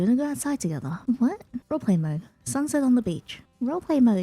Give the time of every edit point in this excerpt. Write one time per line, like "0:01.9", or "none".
0:00.9
0:01.5